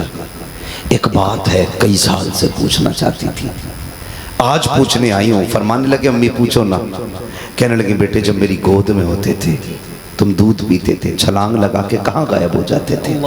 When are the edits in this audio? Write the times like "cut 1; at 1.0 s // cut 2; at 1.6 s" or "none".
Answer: none